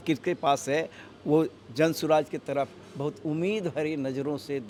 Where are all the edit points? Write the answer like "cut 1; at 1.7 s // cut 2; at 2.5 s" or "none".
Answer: none